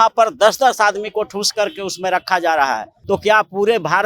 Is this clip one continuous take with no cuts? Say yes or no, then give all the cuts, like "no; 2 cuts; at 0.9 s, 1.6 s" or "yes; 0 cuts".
no; 1 cut; at 2.9 s